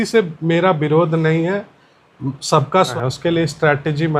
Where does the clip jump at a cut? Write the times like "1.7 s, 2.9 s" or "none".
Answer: 2.9 s